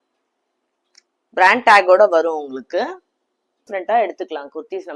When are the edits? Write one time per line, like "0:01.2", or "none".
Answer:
0:03.7

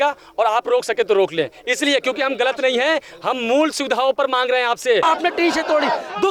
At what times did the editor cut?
0:05.0

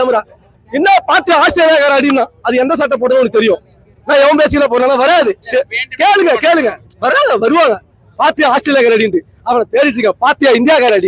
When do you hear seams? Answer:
none

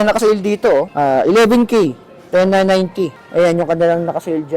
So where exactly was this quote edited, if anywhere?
0:00.9
0:03.2

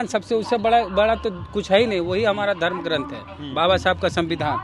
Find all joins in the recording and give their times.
none

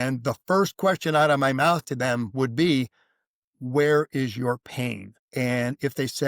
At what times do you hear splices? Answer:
0:05.1

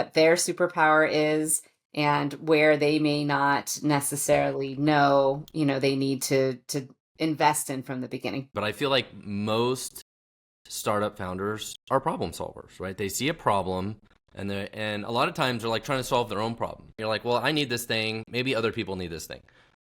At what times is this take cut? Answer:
0:08.5
0:17.0

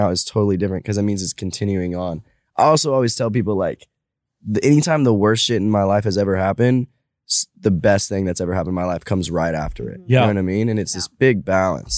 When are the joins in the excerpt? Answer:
none

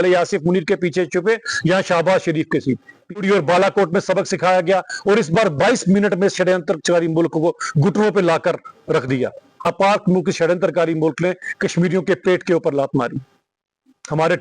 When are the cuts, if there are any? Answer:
0:03.2
0:09.6

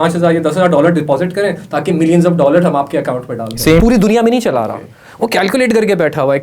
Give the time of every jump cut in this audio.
0:03.8

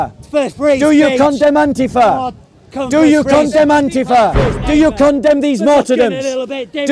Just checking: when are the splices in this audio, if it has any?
0:04.6

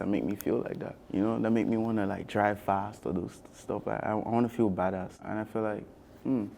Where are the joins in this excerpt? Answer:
0:00.9
0:05.2

